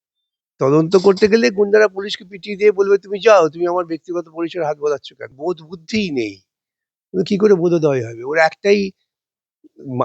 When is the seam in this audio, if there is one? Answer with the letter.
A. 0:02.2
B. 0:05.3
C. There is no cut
B